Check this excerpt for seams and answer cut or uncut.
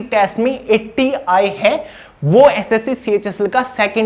uncut